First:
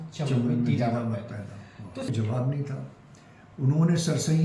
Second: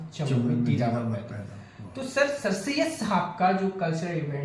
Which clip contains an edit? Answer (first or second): first